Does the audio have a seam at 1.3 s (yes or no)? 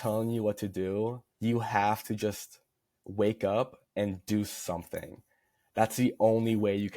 yes